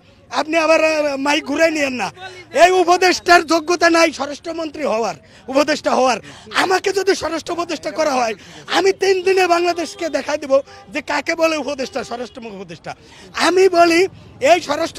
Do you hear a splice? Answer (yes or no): no